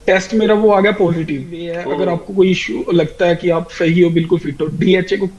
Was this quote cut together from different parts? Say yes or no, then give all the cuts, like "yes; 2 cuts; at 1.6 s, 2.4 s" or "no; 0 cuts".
yes; 1 cut; at 1.7 s